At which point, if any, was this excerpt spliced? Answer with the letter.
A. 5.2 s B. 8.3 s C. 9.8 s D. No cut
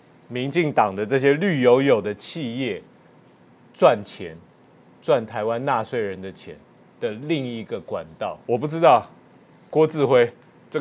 B